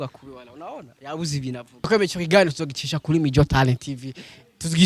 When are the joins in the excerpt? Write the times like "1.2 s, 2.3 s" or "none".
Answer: 1.8 s